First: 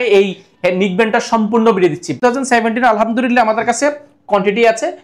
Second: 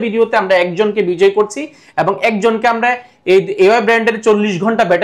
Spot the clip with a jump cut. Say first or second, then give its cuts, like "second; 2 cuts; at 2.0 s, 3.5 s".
first; 1 cut; at 2.1 s